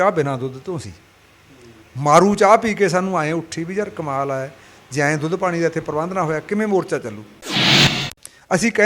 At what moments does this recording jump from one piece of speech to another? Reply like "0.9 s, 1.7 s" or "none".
7.7 s